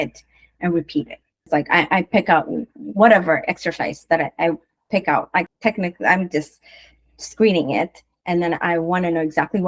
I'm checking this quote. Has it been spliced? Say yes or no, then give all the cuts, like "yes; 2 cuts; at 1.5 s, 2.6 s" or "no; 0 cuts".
yes; 2 cuts; at 1.5 s, 5.4 s